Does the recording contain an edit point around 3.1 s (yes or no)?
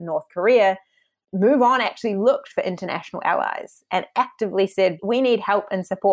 no